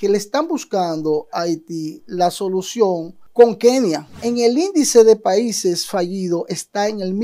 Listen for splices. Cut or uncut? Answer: cut